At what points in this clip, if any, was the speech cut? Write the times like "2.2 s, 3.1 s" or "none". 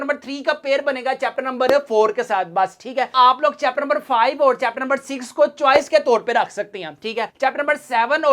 none